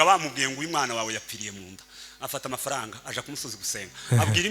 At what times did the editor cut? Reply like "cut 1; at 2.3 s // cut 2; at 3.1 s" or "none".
none